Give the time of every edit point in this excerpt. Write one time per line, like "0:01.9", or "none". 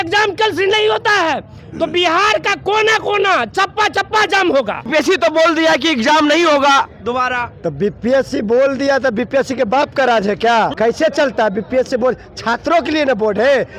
0:04.9
0:10.7